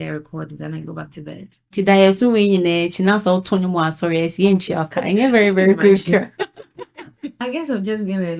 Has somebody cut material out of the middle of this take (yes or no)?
yes